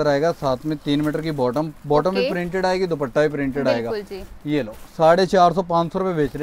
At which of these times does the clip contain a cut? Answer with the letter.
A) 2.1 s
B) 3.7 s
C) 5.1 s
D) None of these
D